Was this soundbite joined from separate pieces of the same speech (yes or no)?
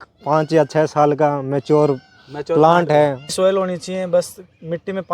yes